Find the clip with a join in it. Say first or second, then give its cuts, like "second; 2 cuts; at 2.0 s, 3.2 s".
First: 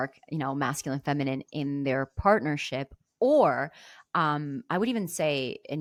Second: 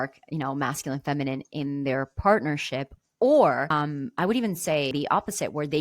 second; 2 cuts; at 3.7 s, 4.9 s